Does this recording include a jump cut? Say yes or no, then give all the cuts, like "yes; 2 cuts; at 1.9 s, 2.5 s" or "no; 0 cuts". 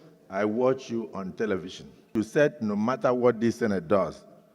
yes; 1 cut; at 2.1 s